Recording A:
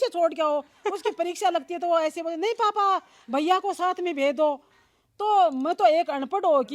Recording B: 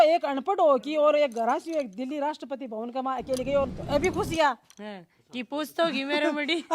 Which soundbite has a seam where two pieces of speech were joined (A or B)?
B